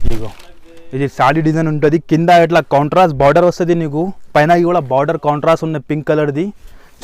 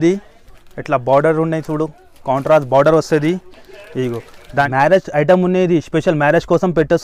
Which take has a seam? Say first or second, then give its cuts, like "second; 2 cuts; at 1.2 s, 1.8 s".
second; 1 cut; at 4.2 s